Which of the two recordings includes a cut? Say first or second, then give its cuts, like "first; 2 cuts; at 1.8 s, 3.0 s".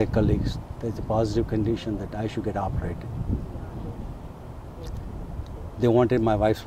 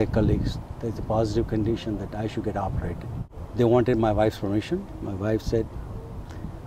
second; 1 cut; at 3.2 s